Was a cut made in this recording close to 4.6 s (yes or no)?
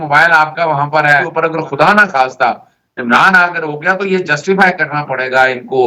no